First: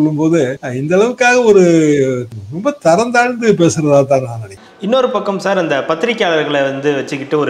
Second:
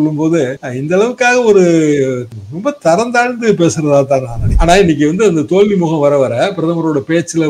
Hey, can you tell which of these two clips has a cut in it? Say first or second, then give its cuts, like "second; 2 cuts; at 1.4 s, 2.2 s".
second; 1 cut; at 4.5 s